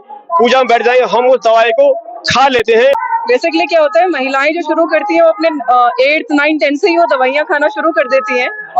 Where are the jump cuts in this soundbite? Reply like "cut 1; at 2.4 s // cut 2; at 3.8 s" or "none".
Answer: cut 1; at 2.7 s